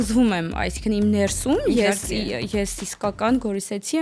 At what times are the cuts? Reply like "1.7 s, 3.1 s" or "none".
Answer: none